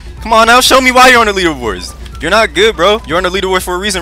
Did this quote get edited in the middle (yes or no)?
yes